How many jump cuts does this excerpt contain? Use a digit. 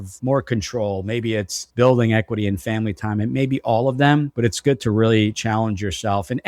0